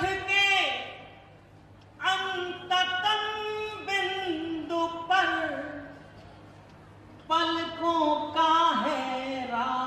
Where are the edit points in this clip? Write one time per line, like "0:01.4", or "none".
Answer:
none